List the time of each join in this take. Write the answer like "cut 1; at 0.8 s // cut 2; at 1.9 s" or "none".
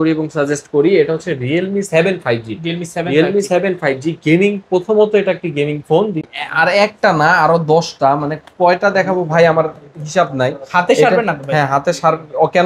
cut 1; at 6.2 s